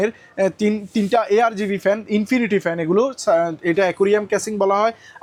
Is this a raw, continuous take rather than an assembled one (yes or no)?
yes